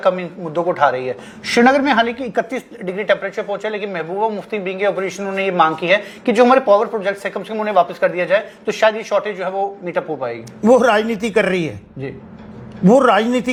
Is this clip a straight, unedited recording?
yes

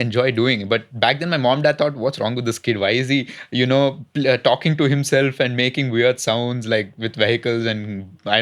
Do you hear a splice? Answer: no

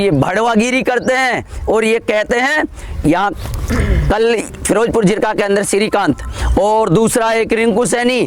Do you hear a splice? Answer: no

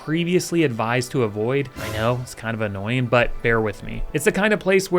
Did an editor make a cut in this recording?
yes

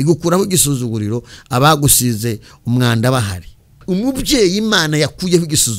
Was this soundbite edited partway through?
yes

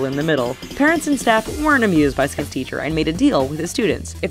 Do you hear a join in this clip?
no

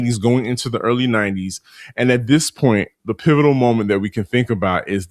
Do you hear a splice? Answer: yes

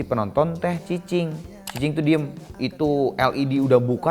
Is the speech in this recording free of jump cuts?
no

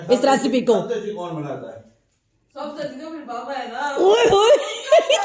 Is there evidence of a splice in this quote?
no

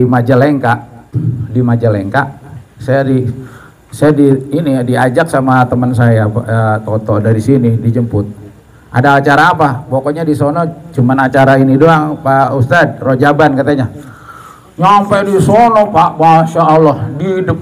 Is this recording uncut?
yes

